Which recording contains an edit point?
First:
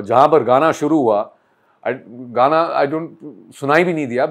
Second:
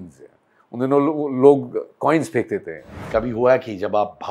second; 1 cut; at 2.9 s

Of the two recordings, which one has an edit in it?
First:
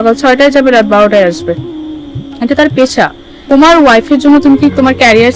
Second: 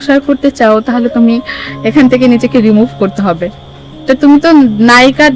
first; 1 cut; at 3.4 s

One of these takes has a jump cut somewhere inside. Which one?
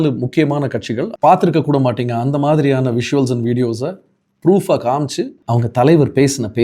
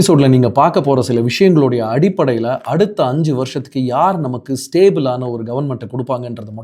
first; 2 cuts; at 1.0 s, 5.4 s

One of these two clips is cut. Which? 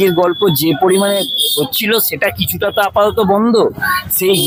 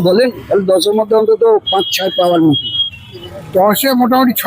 second; 1 cut; at 3.3 s

